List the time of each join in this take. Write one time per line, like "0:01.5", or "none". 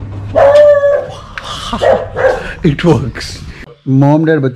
0:03.6